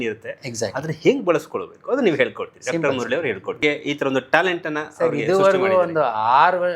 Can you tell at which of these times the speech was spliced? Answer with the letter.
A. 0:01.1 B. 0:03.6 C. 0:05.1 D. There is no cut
B